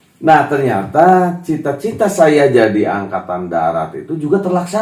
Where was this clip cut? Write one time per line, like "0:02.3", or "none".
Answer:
none